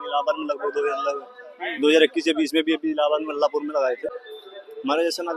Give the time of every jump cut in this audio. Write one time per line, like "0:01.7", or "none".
0:04.2